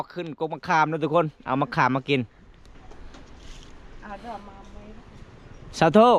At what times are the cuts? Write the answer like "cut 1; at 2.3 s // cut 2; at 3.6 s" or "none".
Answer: cut 1; at 2.7 s